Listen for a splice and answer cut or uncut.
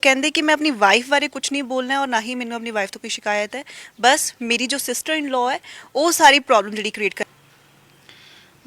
cut